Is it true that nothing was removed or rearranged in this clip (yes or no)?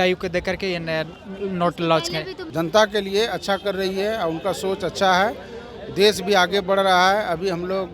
no